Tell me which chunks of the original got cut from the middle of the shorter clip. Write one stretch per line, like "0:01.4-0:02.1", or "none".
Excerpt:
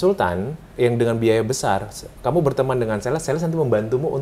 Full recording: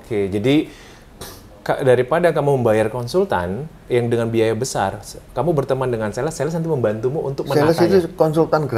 none